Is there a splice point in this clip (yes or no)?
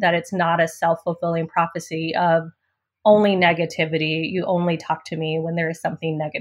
no